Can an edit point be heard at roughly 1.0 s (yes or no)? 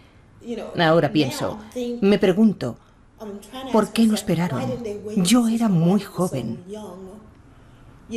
no